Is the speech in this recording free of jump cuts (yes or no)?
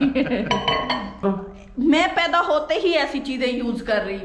no